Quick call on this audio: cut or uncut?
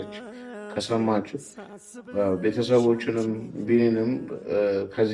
uncut